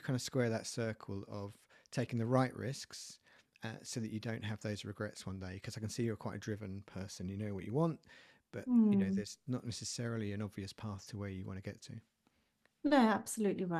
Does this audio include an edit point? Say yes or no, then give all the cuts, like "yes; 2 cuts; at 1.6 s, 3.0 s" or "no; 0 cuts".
no; 0 cuts